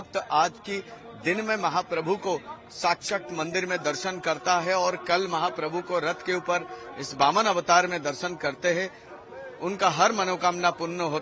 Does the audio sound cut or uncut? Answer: uncut